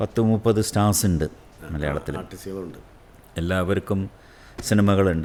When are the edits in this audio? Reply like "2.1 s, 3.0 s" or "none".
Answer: none